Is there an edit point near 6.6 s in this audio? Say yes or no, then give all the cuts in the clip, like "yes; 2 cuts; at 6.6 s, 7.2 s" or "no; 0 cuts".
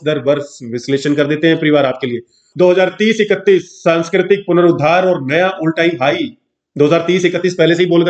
no; 1 cut; at 2.4 s